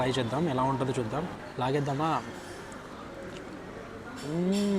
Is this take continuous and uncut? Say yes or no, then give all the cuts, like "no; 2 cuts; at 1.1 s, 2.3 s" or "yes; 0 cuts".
no; 1 cut; at 1.4 s